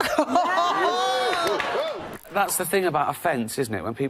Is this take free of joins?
no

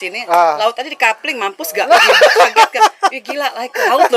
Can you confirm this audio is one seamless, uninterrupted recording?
yes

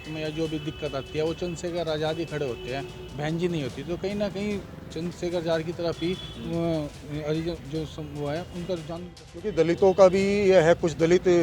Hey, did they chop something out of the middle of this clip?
yes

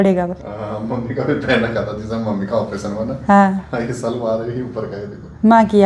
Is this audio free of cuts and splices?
yes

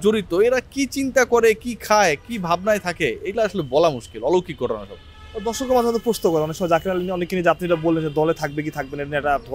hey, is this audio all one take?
yes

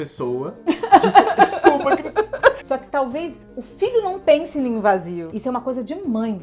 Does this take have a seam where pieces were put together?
yes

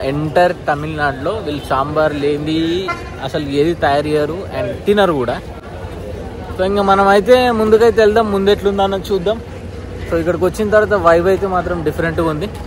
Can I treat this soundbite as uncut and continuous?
yes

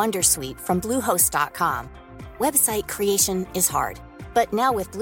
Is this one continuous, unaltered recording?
yes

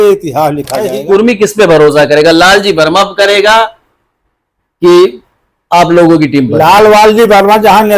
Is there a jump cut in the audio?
yes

